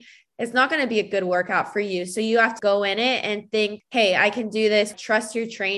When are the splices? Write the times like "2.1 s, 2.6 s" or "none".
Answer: 2.5 s, 3.8 s, 4.9 s